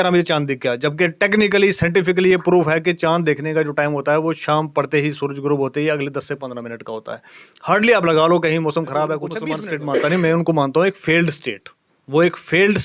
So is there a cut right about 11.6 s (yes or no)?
no